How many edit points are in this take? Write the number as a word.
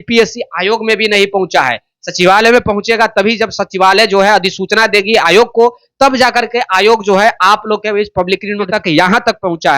one